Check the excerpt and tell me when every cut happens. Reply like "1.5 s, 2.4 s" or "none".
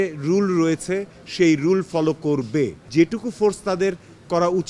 2.8 s